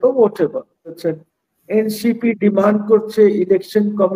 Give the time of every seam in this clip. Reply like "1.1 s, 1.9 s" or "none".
1.0 s